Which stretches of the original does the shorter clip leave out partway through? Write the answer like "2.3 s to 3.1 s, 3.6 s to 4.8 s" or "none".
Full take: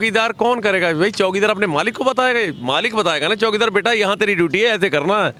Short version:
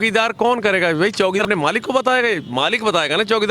1.4 s to 1.5 s